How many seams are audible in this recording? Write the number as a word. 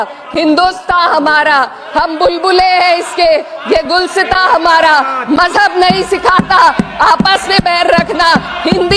zero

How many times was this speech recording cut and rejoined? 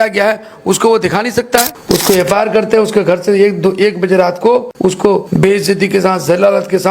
two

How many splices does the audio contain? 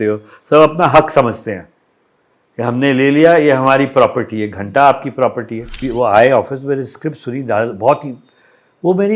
one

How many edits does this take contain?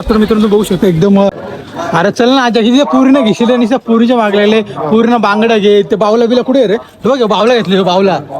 one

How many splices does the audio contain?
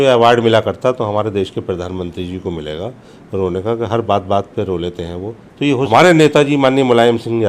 one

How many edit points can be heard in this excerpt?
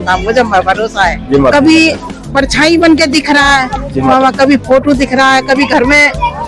one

